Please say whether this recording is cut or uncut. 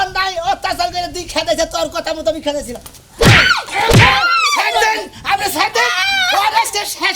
cut